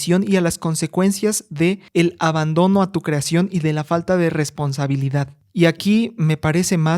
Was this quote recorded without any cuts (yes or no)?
no